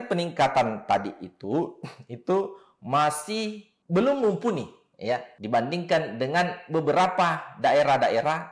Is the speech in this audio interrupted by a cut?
no; 0 cuts

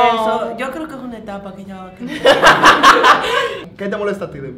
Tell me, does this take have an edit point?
no; 0 cuts

